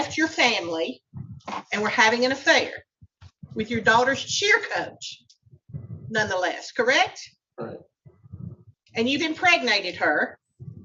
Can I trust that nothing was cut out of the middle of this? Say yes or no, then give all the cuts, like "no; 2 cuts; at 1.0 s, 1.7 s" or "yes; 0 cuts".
yes; 0 cuts